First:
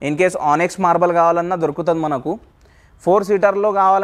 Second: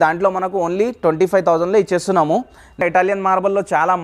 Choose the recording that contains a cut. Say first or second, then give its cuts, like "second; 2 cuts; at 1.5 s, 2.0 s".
second; 1 cut; at 2.8 s